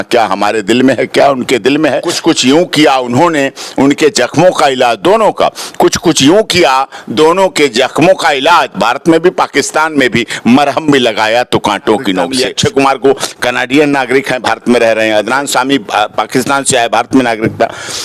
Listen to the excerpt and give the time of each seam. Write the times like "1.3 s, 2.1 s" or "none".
2.1 s, 12.3 s